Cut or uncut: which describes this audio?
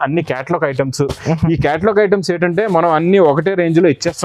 uncut